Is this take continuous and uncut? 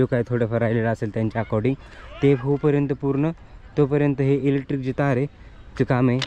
yes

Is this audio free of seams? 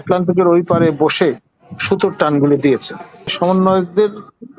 no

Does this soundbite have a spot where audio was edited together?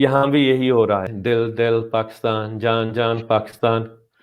yes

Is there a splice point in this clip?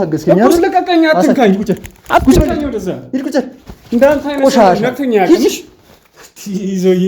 no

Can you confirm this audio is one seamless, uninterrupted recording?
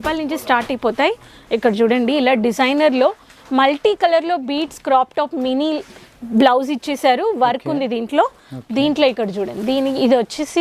yes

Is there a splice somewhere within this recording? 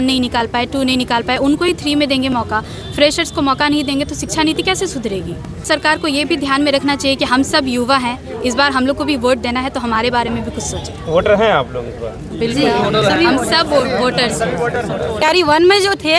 yes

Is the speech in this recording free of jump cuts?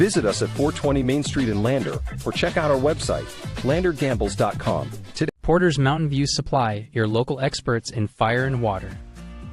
no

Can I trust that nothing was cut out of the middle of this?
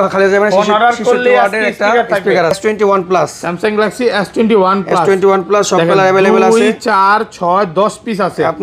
no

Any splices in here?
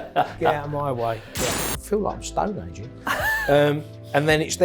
yes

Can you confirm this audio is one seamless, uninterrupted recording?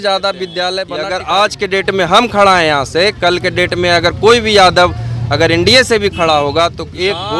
no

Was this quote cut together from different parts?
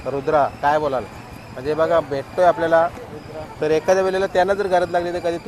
no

